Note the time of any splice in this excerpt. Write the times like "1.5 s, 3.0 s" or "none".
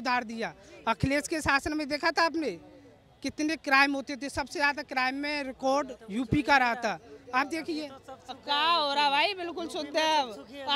none